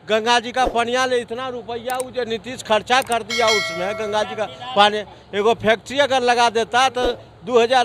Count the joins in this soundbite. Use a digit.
0